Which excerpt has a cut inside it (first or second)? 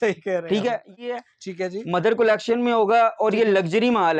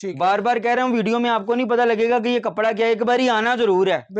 first